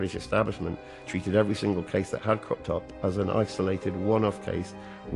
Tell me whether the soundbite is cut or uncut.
uncut